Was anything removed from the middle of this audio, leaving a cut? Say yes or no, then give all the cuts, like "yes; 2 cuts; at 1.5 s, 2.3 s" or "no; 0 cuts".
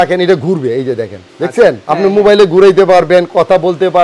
no; 0 cuts